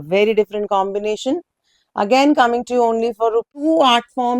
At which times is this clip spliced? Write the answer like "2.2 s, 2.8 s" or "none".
3.5 s

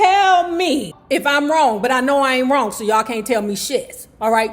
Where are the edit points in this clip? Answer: 0.9 s

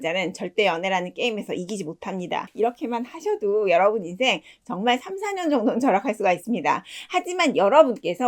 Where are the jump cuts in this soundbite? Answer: 2.5 s

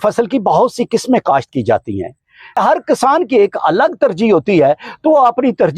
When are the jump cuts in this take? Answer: 2.6 s

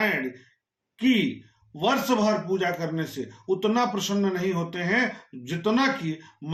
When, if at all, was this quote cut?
none

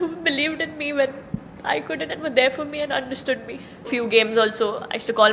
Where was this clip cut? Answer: 3.9 s

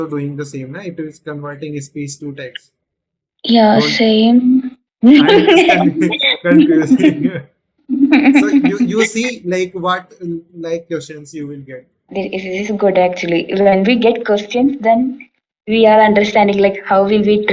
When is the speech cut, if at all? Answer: 4.9 s, 12.1 s

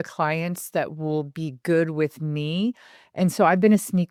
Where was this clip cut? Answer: none

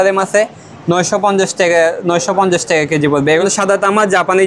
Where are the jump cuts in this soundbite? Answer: 3.4 s

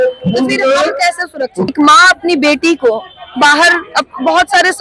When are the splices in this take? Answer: 1.7 s

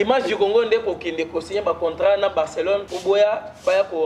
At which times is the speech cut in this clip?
2.9 s

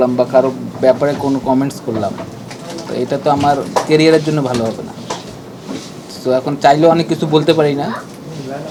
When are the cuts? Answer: none

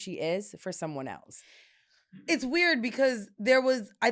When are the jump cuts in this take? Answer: none

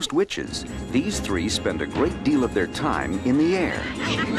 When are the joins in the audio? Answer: 1.0 s

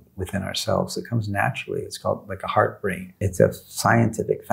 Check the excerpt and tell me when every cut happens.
3.2 s

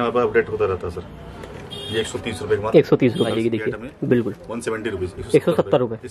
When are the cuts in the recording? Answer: 3.3 s

